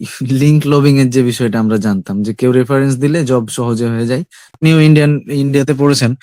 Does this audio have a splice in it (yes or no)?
yes